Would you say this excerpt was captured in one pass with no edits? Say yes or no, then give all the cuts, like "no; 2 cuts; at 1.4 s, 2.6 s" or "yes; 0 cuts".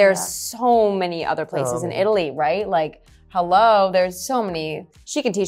yes; 0 cuts